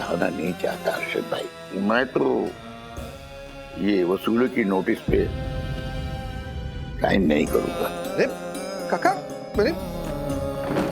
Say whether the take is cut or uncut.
cut